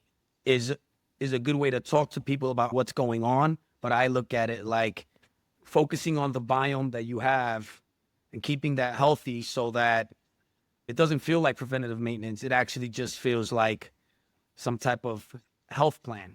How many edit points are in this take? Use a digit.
2